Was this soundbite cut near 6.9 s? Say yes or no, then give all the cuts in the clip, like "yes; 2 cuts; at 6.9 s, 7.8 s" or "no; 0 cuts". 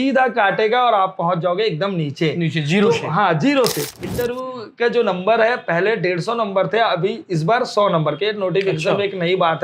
no; 1 cut; at 3.9 s